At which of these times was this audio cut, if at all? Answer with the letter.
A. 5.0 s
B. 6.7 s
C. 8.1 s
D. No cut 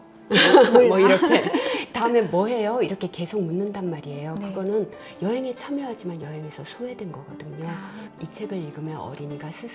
C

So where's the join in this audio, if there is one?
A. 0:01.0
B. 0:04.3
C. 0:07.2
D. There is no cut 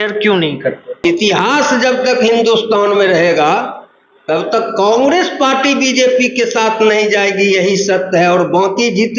A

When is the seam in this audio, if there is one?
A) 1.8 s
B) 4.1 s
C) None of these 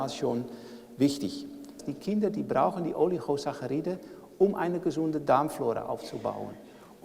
A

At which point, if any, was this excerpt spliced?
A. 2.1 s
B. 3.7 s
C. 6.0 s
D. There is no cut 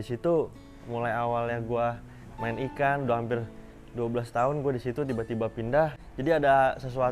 C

